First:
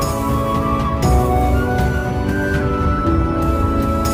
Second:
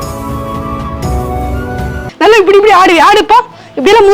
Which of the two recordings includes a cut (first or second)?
second